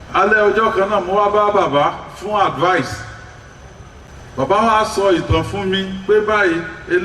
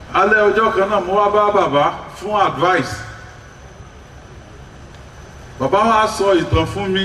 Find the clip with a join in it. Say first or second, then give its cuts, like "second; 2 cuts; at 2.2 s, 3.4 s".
first; 1 cut; at 4.1 s